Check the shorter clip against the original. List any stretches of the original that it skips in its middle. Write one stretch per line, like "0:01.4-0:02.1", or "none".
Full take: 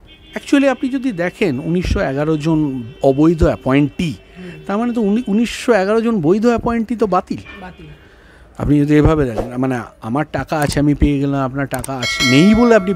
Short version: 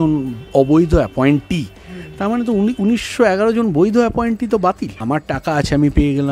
0:07.4-0:10.0